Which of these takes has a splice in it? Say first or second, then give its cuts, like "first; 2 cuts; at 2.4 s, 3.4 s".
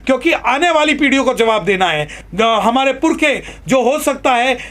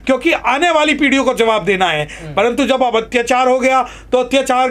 first; 1 cut; at 2.1 s